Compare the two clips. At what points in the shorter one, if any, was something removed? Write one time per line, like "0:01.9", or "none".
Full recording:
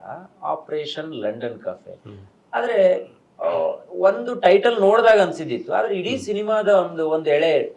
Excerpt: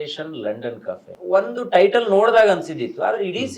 0:01.1